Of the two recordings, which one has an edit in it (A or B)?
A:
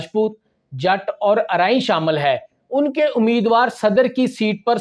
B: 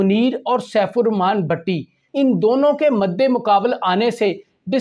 B